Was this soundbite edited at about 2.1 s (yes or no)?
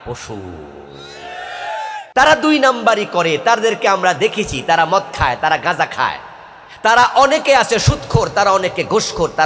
yes